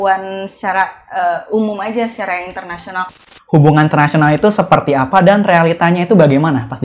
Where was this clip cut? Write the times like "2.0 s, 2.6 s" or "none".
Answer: 3.1 s